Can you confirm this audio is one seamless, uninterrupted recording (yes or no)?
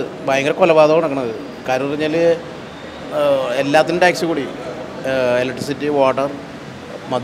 yes